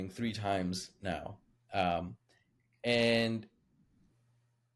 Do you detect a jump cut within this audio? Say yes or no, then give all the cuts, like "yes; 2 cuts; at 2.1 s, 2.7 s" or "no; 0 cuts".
no; 0 cuts